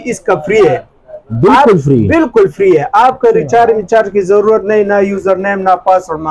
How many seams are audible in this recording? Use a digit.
0